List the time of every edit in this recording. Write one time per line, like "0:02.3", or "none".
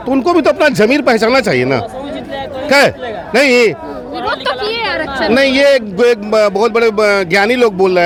none